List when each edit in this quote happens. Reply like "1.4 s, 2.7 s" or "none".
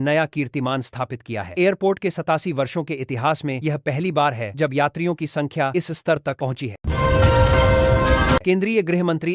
6.8 s, 8.4 s